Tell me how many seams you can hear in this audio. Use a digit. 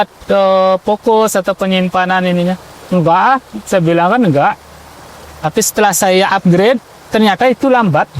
0